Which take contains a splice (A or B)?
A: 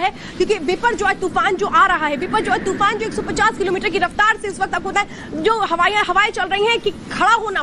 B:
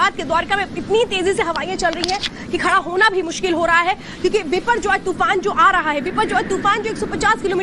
B